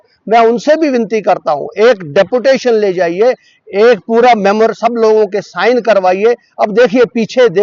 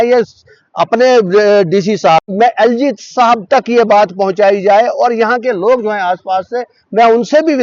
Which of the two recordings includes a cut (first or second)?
second